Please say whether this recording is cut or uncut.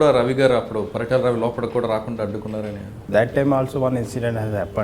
cut